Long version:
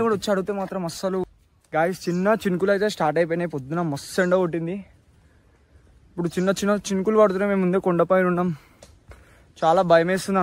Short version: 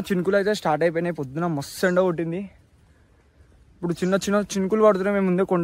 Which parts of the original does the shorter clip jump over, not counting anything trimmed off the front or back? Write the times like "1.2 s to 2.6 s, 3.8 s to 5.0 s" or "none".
none